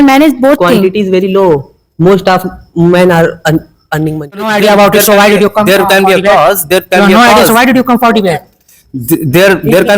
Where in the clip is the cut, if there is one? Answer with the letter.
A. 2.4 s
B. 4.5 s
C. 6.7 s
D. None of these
B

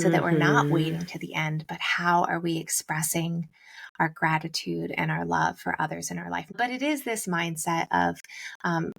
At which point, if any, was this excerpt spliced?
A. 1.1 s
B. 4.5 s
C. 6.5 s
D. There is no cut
C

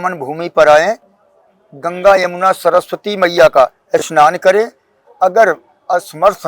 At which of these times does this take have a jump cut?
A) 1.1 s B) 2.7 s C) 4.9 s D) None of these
D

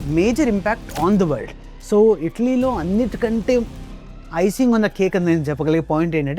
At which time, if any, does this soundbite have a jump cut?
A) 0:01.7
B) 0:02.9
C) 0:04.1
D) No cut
A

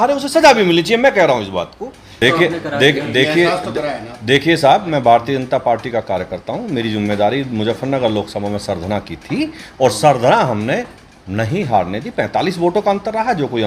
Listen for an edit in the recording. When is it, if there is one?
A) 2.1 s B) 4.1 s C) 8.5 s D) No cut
A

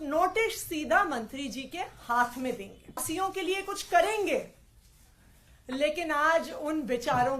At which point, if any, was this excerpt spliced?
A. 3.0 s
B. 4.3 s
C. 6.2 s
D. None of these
A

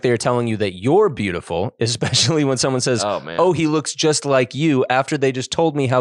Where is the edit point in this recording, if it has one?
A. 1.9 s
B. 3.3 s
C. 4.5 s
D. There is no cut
D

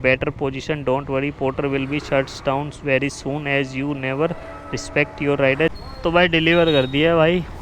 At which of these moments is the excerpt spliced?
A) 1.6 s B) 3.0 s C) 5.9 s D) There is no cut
C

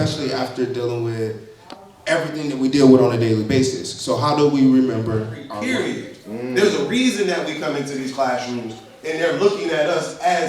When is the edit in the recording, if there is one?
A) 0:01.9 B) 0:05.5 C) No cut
B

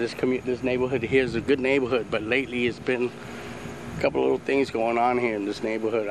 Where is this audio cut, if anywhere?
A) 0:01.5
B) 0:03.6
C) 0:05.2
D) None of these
C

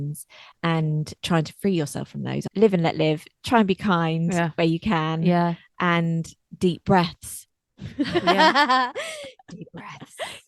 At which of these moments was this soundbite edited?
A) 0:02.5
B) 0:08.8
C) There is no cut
A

